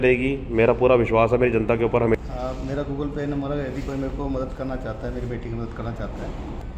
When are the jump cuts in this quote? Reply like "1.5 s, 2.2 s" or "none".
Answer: 2.2 s

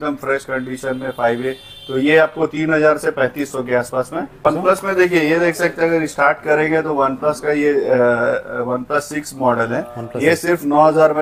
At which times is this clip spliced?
4.5 s

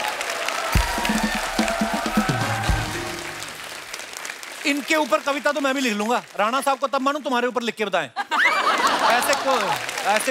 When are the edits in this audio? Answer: none

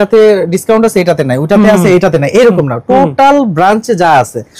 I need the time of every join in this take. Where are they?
none

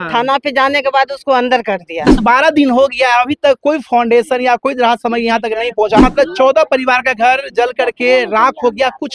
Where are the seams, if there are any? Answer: 2.2 s, 6.0 s

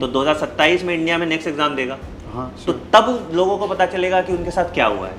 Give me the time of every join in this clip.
none

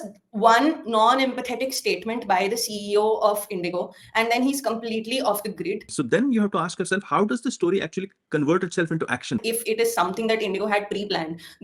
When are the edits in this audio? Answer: 5.9 s, 9.4 s

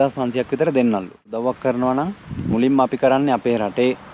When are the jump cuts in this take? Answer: 1.3 s

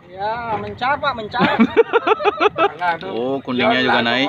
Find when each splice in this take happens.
2.7 s

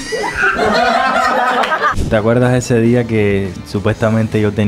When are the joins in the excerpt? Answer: 1.9 s, 3.6 s

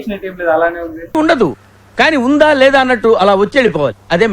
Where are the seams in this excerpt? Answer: 0.9 s

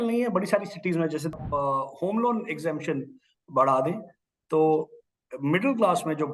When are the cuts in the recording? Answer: 1.3 s

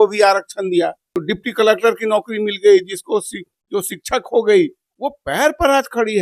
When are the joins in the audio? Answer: 1.2 s

